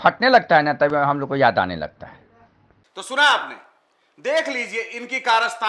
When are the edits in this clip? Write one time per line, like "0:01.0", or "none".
none